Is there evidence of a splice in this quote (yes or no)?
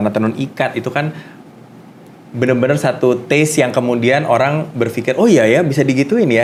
no